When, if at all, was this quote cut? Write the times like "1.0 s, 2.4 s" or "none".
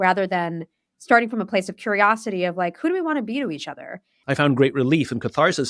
4.1 s